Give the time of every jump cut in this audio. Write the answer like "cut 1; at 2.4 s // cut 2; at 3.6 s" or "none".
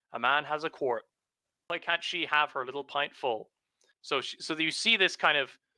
cut 1; at 1.6 s // cut 2; at 4.0 s